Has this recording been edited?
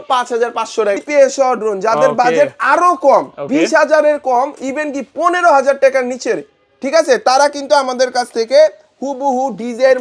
yes; 1 cut; at 1.0 s

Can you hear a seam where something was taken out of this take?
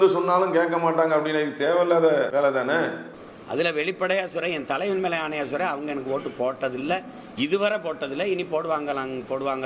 no; 0 cuts

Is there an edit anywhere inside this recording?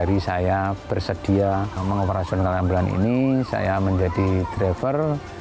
yes; 1 cut; at 1.8 s

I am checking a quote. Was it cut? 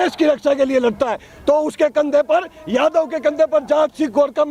no; 0 cuts

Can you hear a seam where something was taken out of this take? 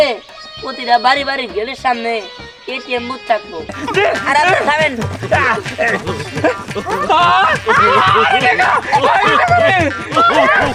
no; 0 cuts

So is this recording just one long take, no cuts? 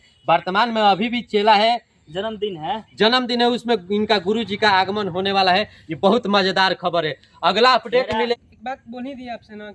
no; 2 cuts; at 2.0 s, 8.3 s

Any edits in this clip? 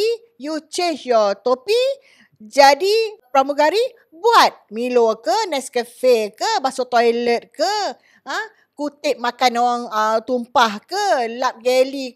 yes; 1 cut; at 3.3 s

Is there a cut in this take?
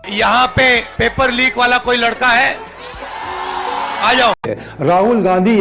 yes; 1 cut; at 4.4 s

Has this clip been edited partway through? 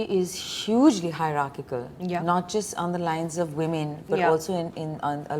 no; 0 cuts

